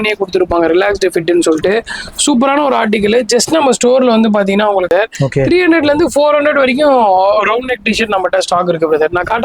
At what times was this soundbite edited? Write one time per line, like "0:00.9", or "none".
0:04.9